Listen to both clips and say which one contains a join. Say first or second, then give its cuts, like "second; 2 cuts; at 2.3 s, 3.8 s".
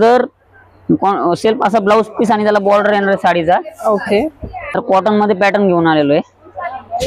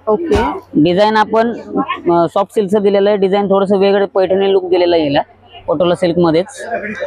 first; 1 cut; at 4.8 s